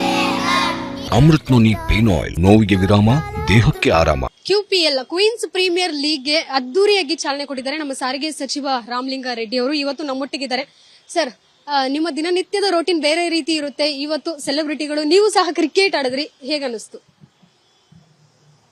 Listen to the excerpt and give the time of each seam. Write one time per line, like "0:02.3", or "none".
0:01.0
0:02.3
0:04.3